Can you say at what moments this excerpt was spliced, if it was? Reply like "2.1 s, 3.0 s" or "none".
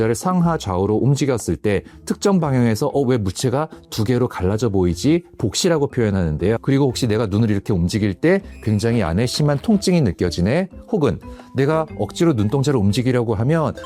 none